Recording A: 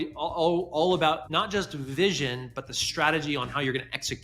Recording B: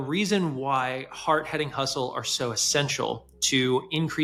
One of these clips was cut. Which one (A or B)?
A